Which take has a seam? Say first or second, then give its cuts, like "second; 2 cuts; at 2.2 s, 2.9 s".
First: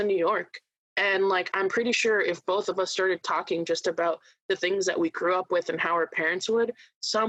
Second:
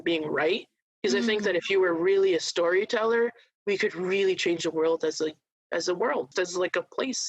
second; 1 cut; at 6.3 s